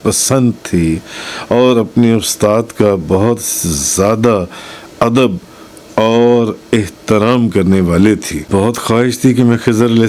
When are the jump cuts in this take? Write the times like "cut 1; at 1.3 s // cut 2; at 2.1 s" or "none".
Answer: cut 1; at 8.4 s